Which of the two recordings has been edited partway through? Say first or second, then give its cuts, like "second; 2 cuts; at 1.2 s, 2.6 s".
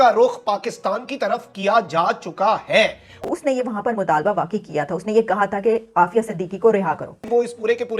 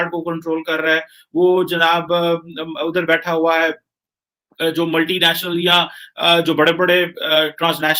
first; 2 cuts; at 3.2 s, 7.2 s